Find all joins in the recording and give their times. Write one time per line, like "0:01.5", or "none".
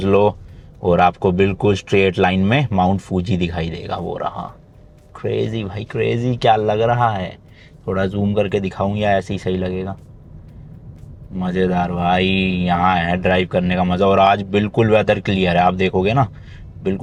none